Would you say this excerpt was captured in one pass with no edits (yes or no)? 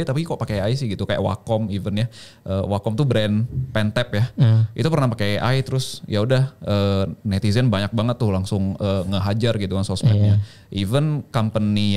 yes